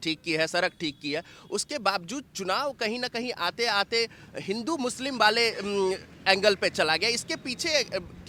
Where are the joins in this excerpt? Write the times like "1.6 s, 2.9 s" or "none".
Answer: none